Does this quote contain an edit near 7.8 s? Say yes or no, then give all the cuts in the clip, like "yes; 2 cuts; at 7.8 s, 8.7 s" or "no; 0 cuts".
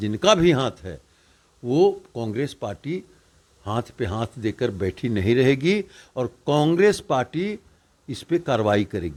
no; 0 cuts